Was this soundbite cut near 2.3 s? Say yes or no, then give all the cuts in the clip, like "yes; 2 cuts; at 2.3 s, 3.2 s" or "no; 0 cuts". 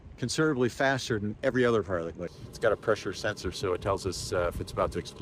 yes; 1 cut; at 2.3 s